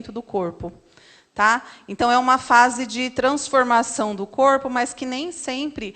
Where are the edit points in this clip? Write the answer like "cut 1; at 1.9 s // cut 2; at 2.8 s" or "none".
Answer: none